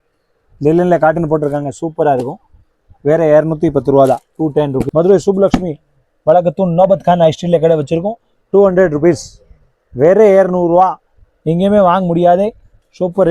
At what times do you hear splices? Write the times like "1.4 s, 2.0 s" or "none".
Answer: 4.9 s